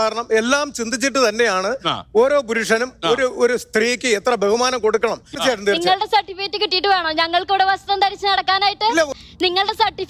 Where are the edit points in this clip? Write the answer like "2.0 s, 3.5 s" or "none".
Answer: 5.4 s, 9.1 s